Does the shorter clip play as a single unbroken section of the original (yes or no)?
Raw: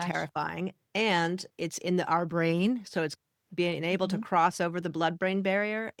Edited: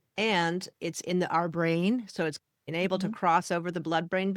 no